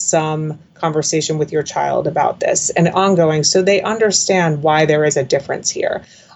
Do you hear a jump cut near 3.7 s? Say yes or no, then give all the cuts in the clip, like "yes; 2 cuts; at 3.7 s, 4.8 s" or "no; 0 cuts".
no; 0 cuts